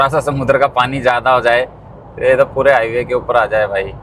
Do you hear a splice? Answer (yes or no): no